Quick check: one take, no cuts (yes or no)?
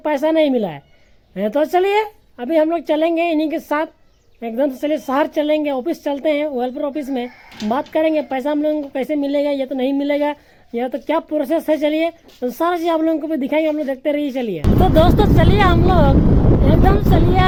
yes